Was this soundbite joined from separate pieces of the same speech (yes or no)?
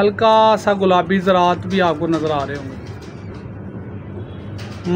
no